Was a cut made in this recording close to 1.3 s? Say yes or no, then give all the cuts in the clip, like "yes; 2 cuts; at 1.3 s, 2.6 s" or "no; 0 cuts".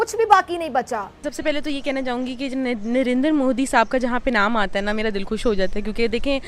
yes; 1 cut; at 1.3 s